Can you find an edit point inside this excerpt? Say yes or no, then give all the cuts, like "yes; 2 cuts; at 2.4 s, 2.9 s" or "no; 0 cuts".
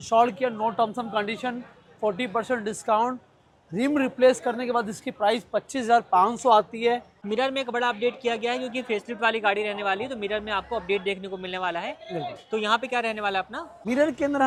no; 0 cuts